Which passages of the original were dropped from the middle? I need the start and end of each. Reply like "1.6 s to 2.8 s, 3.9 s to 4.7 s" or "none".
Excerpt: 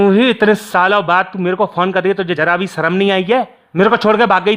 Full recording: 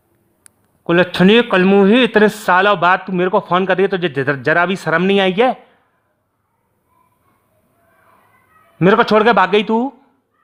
4.1 s to 4.4 s, 5.7 s to 8.7 s

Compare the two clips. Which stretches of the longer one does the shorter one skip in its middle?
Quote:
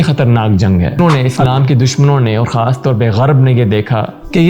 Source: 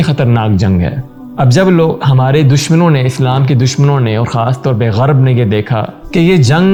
1.0 s to 2.8 s

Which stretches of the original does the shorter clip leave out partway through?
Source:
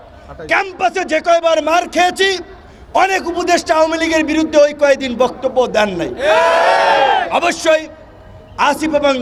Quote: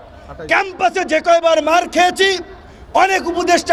none

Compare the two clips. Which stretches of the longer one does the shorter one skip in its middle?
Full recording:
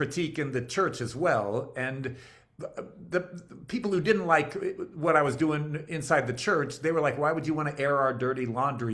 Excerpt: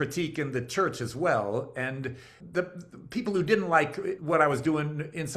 2.3 s to 2.9 s, 4.8 s to 4.9 s

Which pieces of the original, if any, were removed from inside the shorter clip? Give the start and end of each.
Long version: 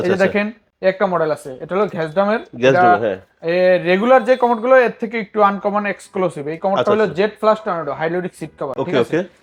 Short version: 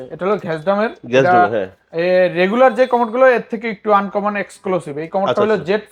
none

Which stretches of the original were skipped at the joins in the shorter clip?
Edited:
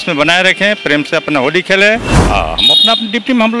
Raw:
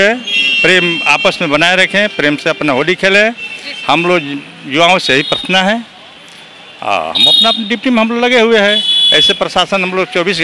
3.5 s to 6.7 s

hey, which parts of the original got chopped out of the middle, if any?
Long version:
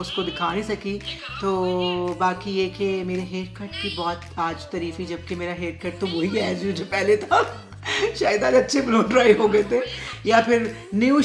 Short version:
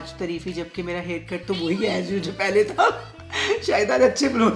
none

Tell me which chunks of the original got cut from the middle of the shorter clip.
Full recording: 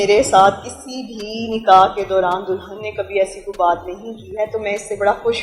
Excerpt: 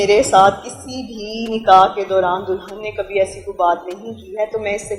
none

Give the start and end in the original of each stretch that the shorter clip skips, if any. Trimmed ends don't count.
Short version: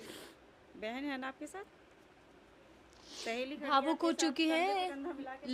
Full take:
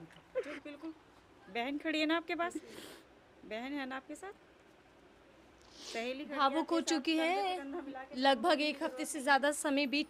none

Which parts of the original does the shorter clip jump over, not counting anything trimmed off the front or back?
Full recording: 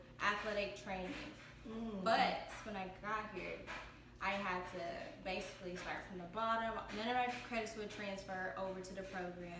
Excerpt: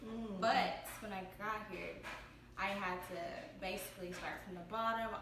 none

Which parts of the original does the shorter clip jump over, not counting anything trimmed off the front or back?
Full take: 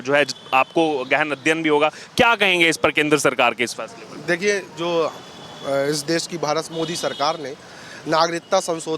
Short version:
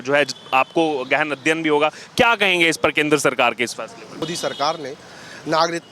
4.2 s to 6.8 s

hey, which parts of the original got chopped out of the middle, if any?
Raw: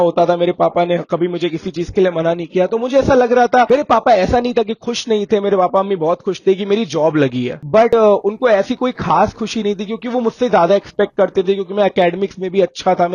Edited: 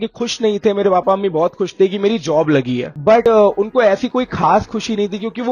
none

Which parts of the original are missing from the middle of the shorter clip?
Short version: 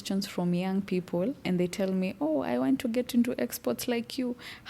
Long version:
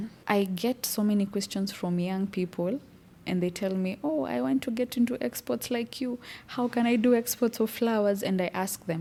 2.8 s to 3.2 s

